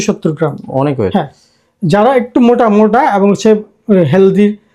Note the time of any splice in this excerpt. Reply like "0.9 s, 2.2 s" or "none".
none